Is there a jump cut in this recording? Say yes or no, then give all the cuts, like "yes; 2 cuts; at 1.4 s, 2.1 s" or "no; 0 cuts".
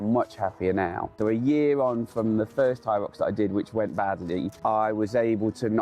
yes; 2 cuts; at 1.1 s, 4.5 s